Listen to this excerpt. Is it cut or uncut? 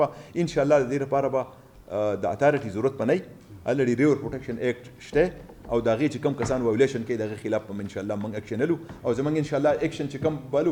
uncut